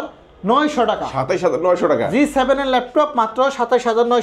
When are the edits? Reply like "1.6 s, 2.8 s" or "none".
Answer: none